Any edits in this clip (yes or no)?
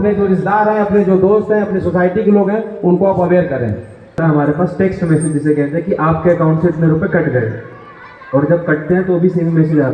yes